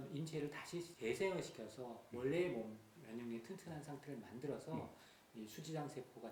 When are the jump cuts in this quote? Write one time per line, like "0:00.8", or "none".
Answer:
0:00.9